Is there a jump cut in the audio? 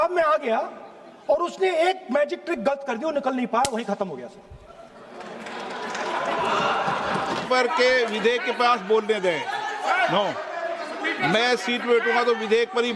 yes; 1 cut; at 7.4 s

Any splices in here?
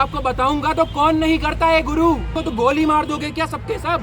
yes; 1 cut; at 2.3 s

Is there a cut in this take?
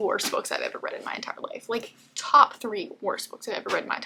no; 0 cuts

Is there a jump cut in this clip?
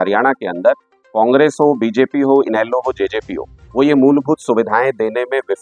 no; 0 cuts

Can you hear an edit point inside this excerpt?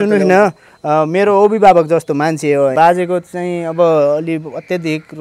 yes; 1 cut; at 2.7 s

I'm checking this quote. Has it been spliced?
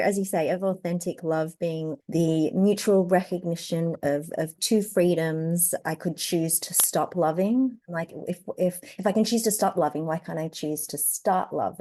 yes; 3 cuts; at 2.0 s, 5.8 s, 7.8 s

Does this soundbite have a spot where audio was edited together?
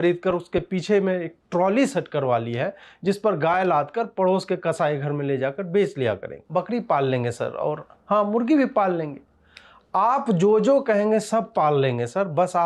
yes; 1 cut; at 6.3 s

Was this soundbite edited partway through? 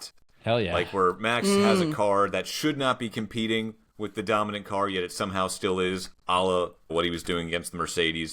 yes; 1 cut; at 6.9 s

